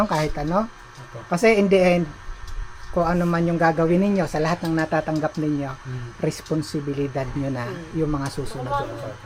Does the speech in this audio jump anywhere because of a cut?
no; 0 cuts

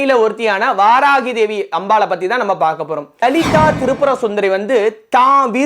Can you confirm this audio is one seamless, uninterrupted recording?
no; 1 cut; at 3.2 s

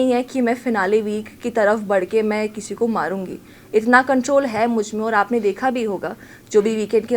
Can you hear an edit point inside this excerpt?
no; 0 cuts

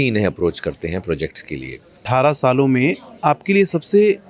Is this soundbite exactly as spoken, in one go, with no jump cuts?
no; 1 cut; at 2.0 s

